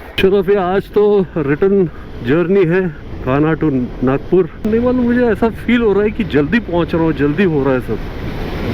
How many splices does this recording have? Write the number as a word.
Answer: one